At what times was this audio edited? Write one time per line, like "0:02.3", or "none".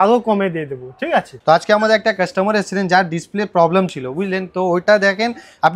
0:01.3